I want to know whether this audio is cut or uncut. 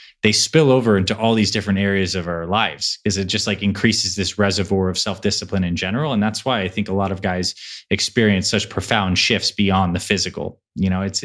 uncut